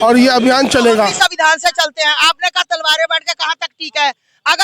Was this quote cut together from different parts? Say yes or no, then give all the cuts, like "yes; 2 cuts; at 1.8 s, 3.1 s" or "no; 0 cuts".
yes; 1 cut; at 1.1 s